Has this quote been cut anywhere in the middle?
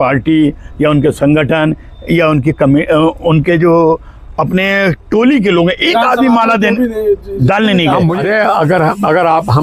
yes; 1 cut; at 8.2 s

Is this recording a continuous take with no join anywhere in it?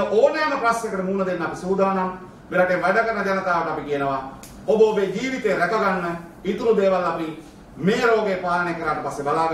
yes; 0 cuts

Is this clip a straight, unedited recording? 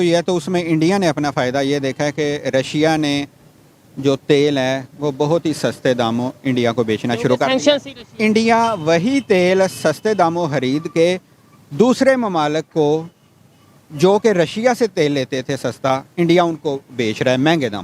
yes; 0 cuts

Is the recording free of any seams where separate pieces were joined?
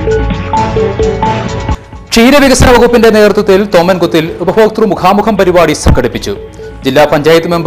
no; 1 cut; at 1.7 s

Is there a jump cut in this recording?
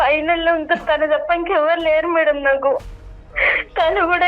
yes; 1 cut; at 2.9 s

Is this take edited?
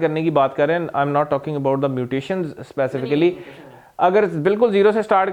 no; 0 cuts

